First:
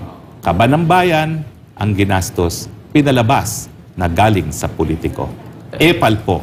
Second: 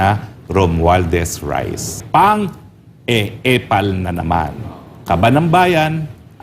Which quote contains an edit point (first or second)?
second